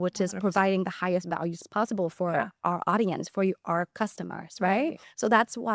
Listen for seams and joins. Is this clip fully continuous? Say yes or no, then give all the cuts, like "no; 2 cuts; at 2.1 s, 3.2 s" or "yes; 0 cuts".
no; 1 cut; at 1.6 s